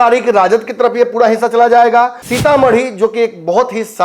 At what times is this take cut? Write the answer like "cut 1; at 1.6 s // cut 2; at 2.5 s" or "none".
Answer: cut 1; at 2.2 s